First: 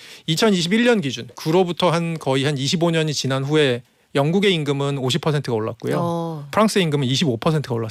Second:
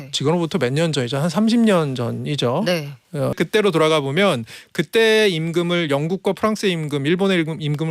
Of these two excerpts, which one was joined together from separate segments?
second; 1 cut; at 3.3 s

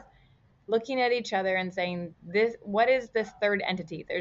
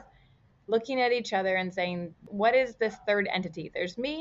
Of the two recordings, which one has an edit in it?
second; 1 cut; at 2.2 s

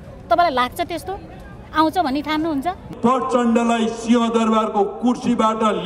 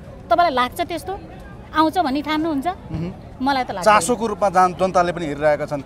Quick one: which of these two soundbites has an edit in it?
first; 1 cut; at 2.8 s

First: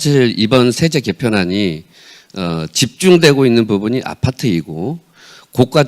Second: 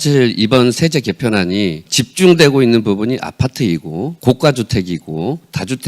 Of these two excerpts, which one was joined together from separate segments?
second; 2 cuts; at 1.9 s, 4.1 s

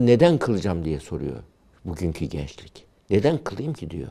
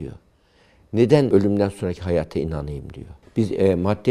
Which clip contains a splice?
second; 2 cuts; at 1.3 s, 3.2 s

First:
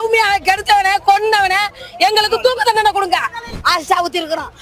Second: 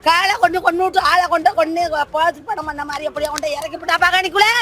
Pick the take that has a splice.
first; 1 cut; at 3.4 s

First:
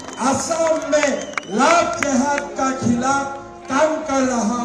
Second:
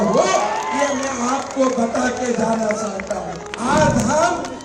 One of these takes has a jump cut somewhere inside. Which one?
second; 1 cut; at 3.0 s

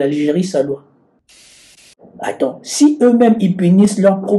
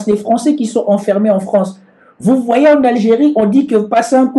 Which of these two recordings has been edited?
first; 1 cut; at 1.5 s

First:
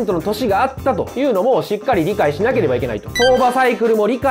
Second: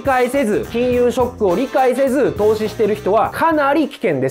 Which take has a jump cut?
first; 2 cuts; at 1.1 s, 3.1 s

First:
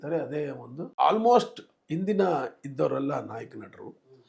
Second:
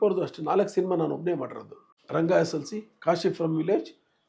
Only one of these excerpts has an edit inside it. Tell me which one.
first; 1 cut; at 0.9 s

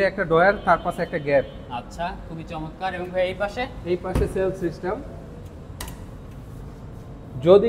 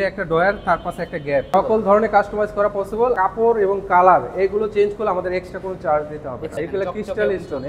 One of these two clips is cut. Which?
second; 3 cuts; at 1.5 s, 3.1 s, 6.5 s

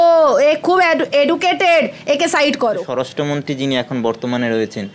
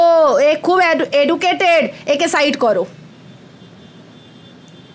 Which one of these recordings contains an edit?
first; 1 cut; at 2.9 s

